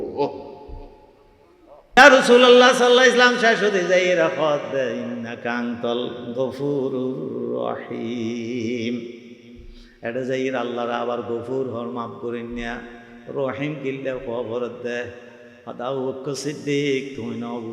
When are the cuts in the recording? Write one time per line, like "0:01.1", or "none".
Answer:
0:02.0